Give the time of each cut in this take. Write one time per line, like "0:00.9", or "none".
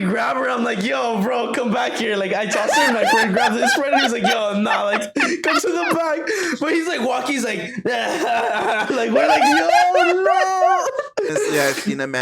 0:11.3